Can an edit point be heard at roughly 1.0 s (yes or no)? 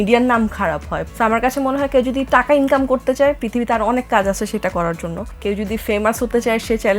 yes